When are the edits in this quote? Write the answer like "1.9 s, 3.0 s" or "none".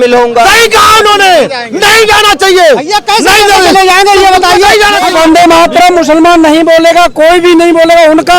5.1 s

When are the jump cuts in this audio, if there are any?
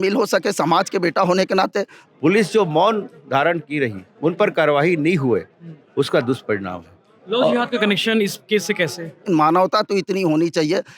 2.0 s, 9.2 s

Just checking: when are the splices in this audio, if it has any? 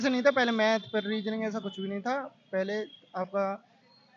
none

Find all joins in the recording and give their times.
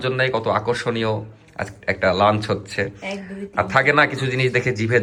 none

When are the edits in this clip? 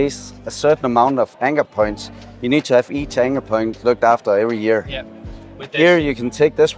1.3 s

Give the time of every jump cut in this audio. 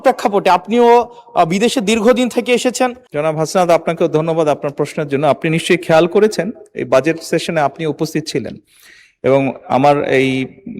3.1 s

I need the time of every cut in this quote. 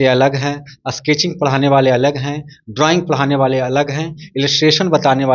none

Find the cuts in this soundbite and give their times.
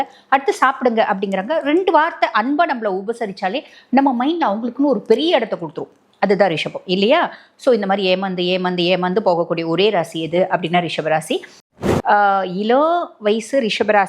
11.6 s

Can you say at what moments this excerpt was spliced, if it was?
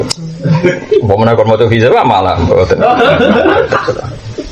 none

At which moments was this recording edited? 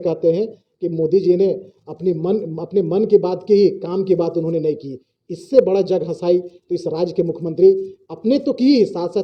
none

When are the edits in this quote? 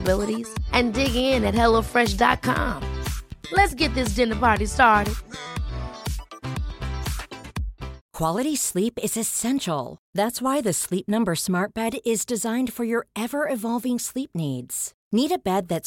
8.0 s

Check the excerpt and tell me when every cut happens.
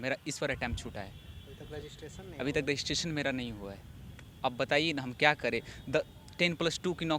none

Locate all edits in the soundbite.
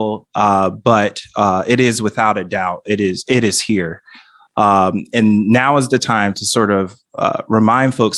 none

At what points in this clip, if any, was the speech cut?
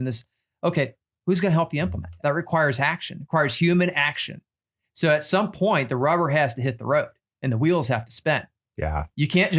1.1 s, 2.1 s

